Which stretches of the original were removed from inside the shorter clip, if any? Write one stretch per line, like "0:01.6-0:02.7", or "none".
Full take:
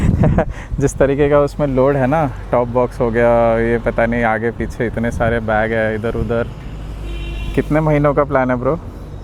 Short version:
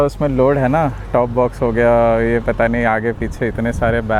none